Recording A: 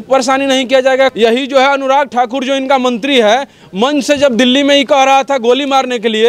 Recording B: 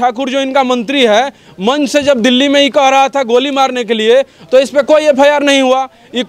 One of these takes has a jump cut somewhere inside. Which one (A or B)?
A